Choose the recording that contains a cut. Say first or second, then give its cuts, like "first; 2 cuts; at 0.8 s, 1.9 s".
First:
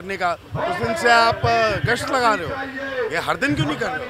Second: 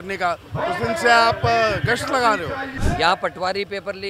second; 1 cut; at 2.7 s